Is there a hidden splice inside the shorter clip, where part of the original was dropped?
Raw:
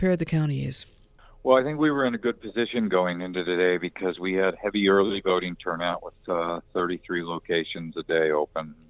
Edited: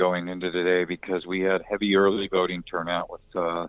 no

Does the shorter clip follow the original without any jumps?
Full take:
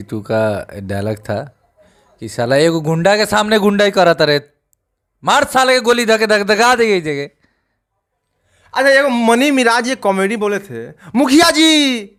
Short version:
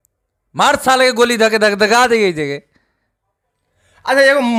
yes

